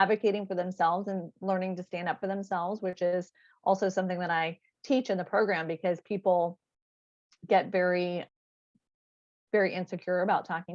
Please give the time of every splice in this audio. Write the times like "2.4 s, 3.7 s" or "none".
none

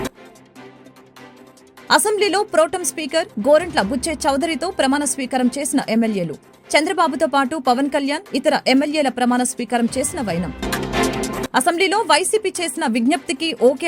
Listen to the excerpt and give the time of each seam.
none

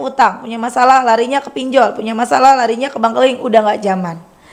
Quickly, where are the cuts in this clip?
none

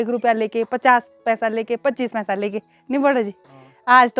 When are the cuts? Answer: none

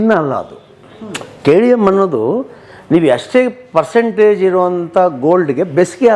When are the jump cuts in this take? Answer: none

